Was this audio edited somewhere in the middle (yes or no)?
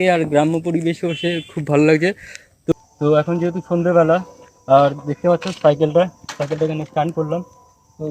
yes